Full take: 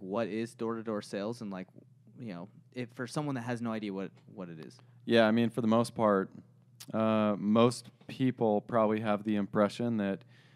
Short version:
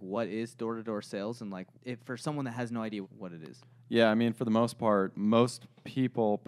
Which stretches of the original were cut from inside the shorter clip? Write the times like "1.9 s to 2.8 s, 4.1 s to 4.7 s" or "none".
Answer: 1.7 s to 2.6 s, 3.9 s to 4.2 s, 6.3 s to 7.4 s